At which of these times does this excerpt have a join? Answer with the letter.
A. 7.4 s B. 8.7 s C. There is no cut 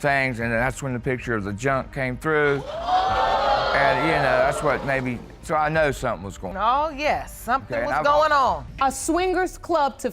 B